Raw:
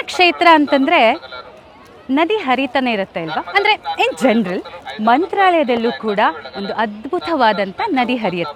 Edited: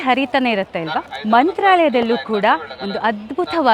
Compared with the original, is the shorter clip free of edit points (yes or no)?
no